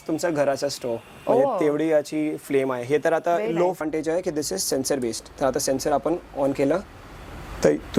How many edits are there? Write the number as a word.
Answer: one